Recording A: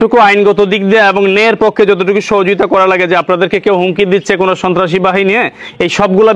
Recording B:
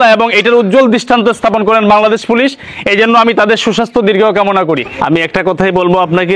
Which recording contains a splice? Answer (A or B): B